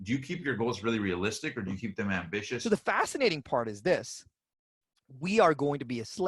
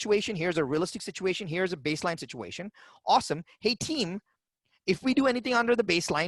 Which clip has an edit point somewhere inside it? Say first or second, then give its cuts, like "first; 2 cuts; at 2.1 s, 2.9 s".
first; 1 cut; at 2.5 s